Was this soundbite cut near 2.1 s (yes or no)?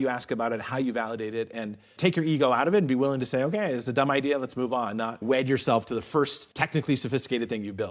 no